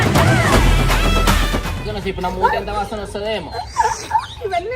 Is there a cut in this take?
yes; 1 cut; at 1.9 s

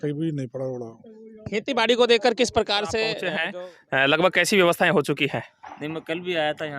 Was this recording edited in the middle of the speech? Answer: yes; 1 cut; at 3.3 s

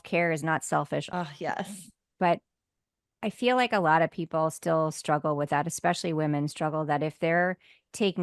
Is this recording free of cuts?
no; 1 cut; at 1.1 s

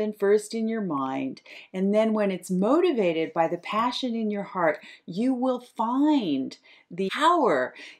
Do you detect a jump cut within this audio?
yes; 1 cut; at 7.1 s

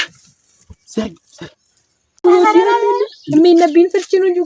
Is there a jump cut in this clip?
yes; 1 cut; at 2.2 s

